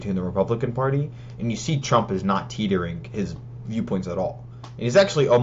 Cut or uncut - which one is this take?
uncut